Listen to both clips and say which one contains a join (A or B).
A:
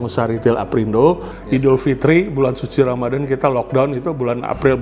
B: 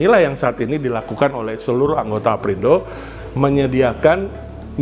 A